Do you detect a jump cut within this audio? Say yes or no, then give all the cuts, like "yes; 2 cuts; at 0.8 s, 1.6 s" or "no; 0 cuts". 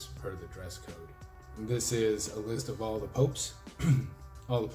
yes; 1 cut; at 1.5 s